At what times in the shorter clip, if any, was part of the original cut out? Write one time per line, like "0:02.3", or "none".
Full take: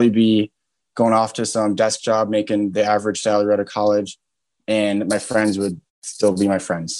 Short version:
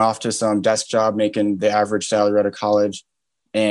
none